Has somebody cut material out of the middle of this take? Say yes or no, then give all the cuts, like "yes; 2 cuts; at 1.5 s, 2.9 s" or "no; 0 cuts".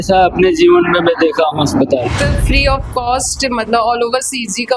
yes; 1 cut; at 2.1 s